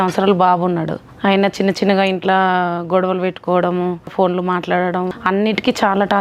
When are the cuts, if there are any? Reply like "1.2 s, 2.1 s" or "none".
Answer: 1.0 s, 4.1 s, 5.1 s